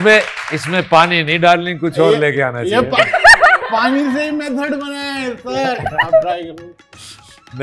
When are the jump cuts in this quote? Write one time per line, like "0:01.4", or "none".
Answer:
none